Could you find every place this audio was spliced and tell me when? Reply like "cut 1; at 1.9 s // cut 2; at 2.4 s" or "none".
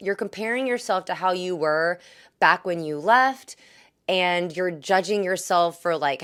none

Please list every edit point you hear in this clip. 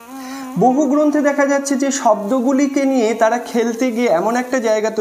none

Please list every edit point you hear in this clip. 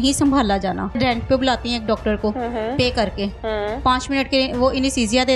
cut 1; at 1.0 s

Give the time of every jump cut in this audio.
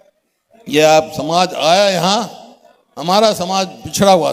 none

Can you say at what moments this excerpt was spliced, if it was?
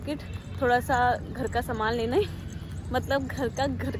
none

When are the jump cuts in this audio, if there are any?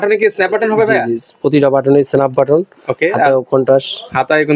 none

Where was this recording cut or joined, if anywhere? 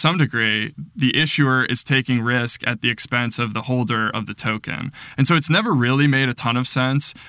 none

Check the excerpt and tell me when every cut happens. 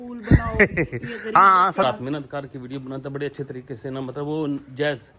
cut 1; at 1.8 s

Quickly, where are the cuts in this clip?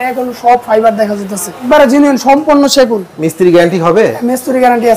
cut 1; at 1.6 s

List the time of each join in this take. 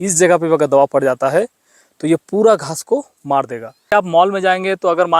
cut 1; at 3.9 s

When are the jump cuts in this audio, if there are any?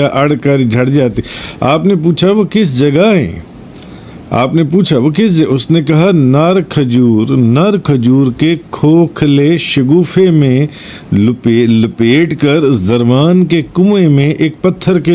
none

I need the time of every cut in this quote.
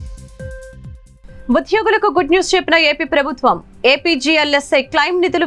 cut 1; at 1.0 s

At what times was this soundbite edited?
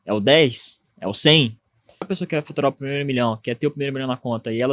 cut 1; at 2.1 s

